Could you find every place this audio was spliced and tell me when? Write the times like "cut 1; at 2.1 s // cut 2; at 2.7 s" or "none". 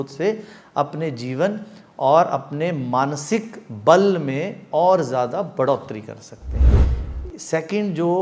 cut 1; at 6.8 s